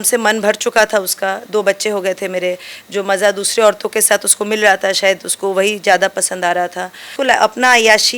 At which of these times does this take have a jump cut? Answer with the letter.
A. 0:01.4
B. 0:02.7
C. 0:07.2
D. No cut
C